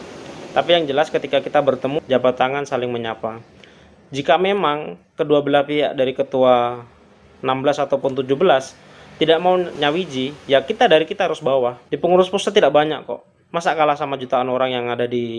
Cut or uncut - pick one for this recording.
cut